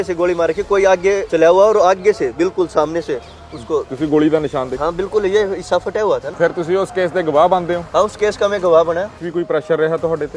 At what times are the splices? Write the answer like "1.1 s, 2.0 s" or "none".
1.2 s, 6.3 s, 9.2 s